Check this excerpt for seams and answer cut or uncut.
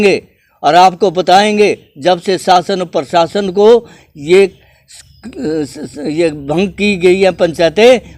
uncut